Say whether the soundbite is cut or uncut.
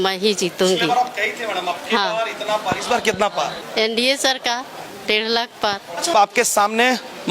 cut